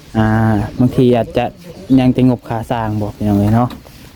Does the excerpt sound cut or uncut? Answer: uncut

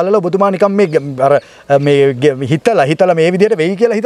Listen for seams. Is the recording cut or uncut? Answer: uncut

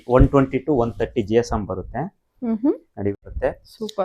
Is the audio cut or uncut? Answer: cut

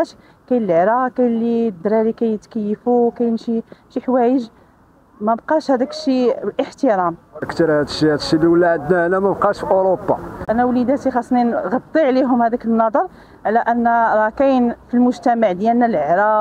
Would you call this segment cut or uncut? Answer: cut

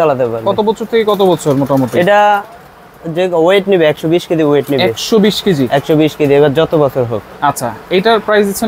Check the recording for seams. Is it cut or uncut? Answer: uncut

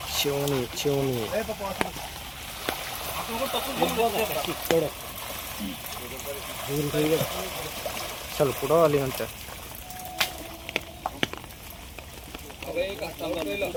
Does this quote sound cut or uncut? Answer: uncut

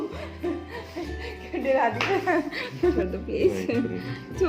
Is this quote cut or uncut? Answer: cut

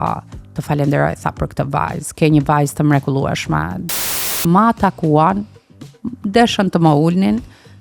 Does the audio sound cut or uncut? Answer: cut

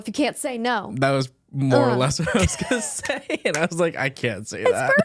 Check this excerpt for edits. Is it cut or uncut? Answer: uncut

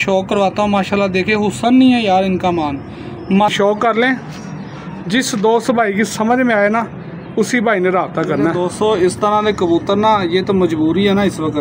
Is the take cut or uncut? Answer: cut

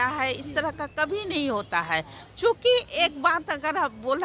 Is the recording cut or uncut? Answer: uncut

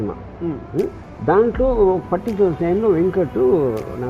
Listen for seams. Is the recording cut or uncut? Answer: cut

